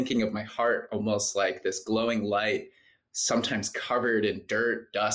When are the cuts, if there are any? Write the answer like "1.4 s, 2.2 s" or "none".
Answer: none

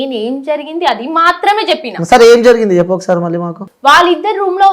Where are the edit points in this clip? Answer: 3.6 s

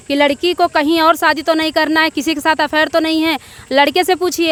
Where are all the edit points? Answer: none

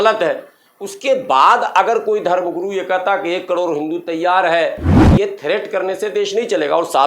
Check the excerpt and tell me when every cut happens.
5.0 s

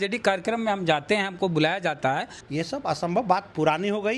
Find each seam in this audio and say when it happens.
2.3 s

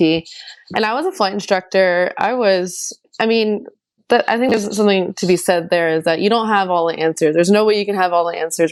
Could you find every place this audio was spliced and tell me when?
none

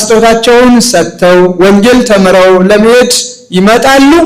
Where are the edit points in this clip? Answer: none

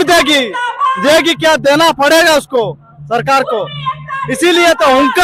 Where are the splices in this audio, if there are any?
none

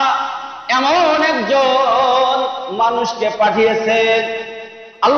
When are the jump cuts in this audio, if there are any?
none

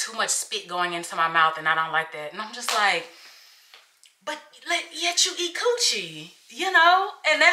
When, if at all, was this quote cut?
none

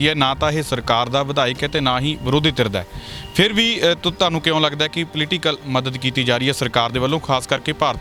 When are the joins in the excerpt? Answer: none

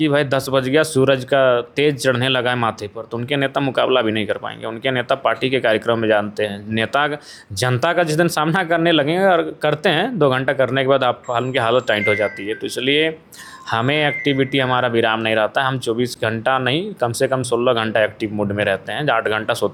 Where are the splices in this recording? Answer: none

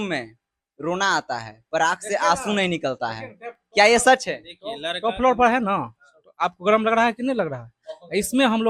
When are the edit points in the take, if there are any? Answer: none

